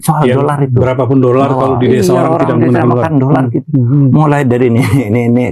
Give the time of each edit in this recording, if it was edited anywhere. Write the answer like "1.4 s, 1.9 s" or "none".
none